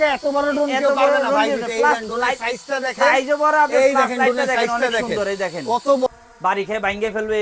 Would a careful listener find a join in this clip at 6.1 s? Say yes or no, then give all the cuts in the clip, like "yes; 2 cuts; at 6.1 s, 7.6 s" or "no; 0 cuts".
yes; 1 cut; at 6.1 s